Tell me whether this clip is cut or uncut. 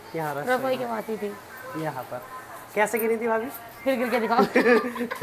uncut